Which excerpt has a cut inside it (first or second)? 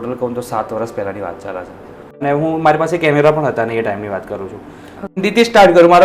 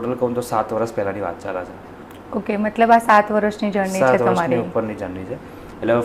first